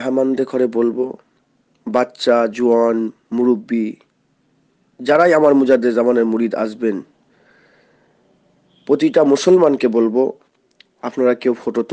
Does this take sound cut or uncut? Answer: uncut